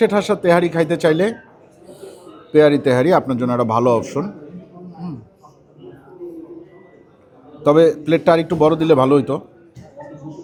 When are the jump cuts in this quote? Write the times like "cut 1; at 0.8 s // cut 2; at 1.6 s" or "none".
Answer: none